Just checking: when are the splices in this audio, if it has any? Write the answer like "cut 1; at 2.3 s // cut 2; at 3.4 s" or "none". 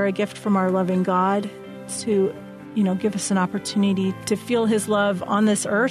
cut 1; at 4.2 s